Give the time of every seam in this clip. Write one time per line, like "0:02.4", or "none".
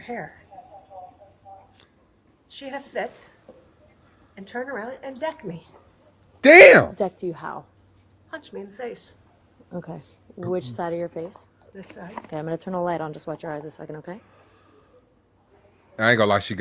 none